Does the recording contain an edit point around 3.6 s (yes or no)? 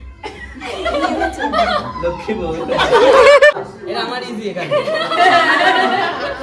yes